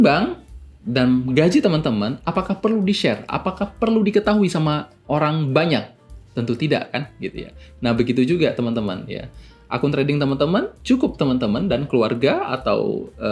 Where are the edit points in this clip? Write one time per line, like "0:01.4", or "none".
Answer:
none